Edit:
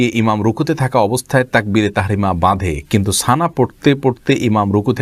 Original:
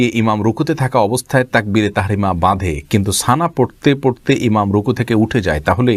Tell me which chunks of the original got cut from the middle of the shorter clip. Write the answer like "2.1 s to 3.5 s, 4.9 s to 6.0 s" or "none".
none